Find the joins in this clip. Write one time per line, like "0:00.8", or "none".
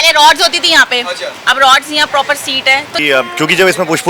0:03.0